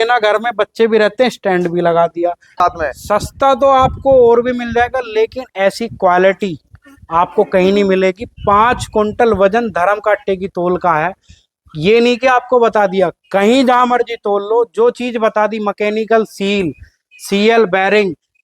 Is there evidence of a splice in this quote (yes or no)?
yes